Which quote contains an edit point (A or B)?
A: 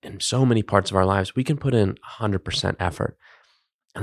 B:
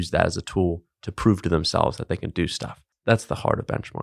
B